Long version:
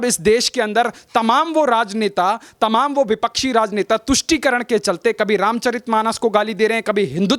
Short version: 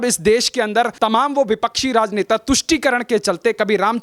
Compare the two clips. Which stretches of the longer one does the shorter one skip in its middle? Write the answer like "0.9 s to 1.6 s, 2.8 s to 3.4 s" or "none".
0.9 s to 2.5 s